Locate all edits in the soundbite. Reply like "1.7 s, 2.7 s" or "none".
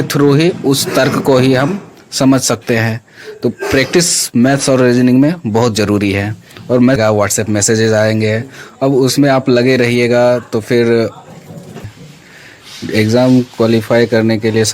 7.0 s, 11.7 s